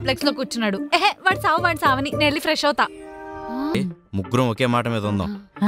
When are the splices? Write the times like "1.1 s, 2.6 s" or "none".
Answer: 3.7 s

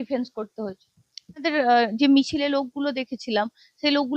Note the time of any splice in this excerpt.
1.4 s

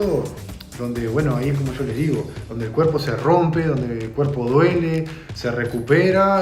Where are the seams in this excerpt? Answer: none

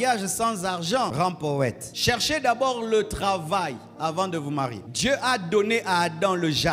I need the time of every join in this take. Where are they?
1.1 s, 1.9 s, 4.9 s

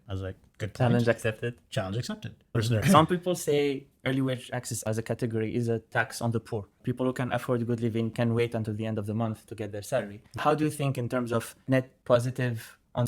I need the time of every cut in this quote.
2.6 s, 10.3 s

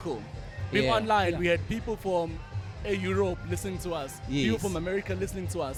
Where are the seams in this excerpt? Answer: none

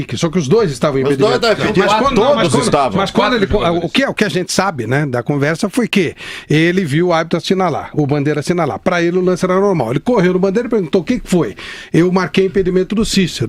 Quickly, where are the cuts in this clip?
none

